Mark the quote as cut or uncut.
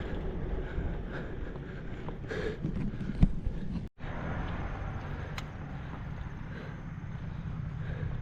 uncut